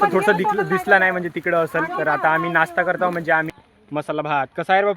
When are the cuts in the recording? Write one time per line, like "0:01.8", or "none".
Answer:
0:03.5

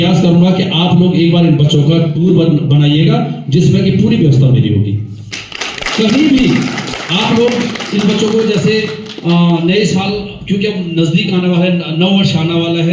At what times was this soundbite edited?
0:02.1

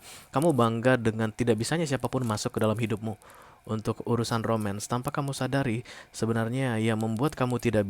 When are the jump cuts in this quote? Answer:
0:01.4

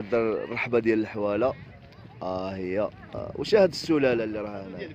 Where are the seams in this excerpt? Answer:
0:03.1

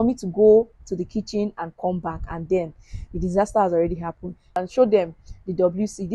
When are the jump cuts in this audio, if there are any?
0:04.4

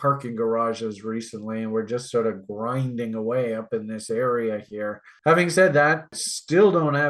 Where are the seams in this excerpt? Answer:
0:05.1

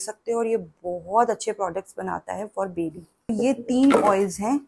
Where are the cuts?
0:03.3

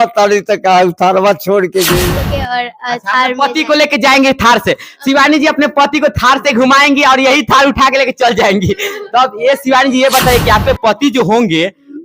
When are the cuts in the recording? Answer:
0:02.0

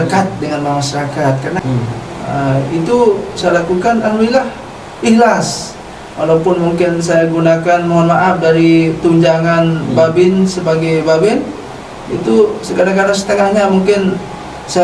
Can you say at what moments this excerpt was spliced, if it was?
0:01.6

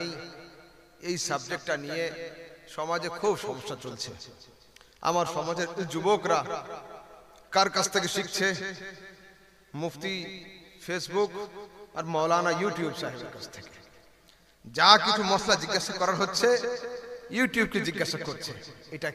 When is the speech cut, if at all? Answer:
none

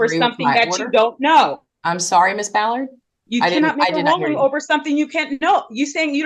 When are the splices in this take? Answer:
none

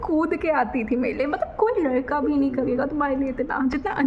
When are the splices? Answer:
none

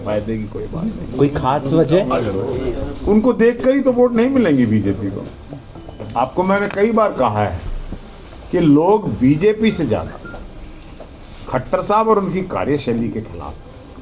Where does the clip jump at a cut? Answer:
none

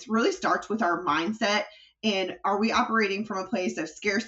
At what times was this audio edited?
none

